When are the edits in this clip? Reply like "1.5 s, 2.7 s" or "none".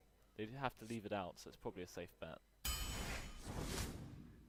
none